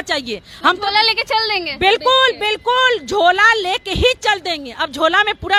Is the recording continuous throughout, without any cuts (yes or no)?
yes